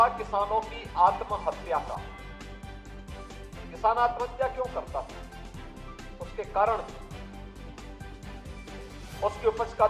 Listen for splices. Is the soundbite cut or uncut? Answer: cut